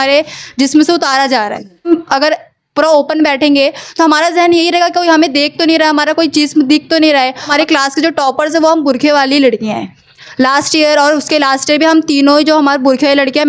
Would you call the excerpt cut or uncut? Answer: cut